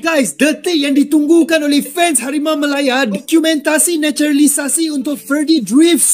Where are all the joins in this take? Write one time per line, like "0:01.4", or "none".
0:03.2